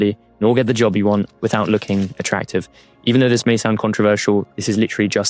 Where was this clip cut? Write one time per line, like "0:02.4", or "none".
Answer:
0:02.7